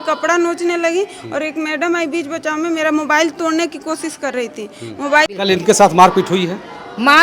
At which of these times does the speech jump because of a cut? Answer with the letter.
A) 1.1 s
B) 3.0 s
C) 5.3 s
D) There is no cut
C